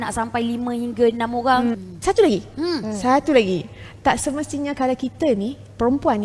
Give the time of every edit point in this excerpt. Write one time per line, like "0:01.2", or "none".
0:01.8